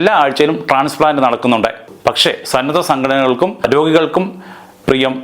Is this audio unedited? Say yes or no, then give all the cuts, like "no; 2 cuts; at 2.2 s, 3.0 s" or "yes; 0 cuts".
no; 2 cuts; at 1.9 s, 3.7 s